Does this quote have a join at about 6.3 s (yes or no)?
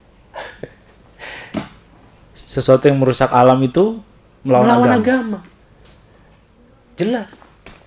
no